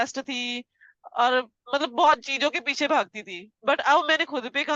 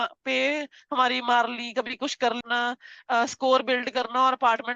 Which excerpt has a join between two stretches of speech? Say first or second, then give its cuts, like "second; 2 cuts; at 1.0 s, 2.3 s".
second; 1 cut; at 2.4 s